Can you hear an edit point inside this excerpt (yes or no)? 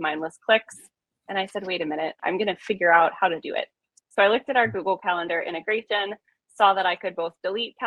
yes